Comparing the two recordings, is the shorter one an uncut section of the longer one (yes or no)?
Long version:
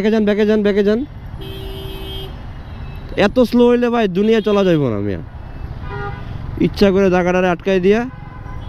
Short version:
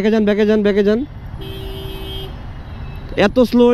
yes